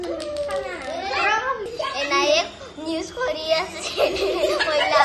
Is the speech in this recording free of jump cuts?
no; 1 cut; at 1.7 s

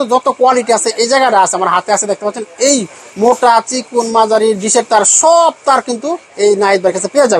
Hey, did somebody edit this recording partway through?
no; 0 cuts

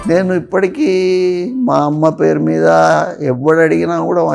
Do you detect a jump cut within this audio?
no; 0 cuts

